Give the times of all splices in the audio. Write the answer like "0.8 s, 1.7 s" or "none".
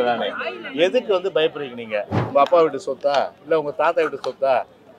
2.2 s